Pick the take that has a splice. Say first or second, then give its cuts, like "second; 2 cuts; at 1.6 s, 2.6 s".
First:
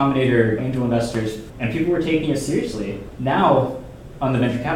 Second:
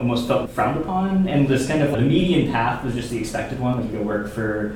first; 2 cuts; at 1.6 s, 3.1 s